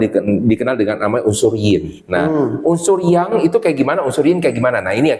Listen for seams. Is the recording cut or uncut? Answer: uncut